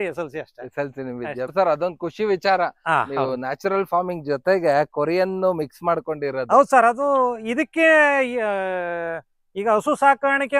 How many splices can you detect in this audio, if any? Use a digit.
1